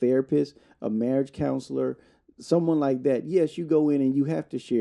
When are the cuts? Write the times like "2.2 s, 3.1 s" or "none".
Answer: none